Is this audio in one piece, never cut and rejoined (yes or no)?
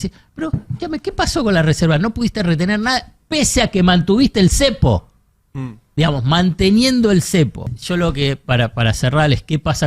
no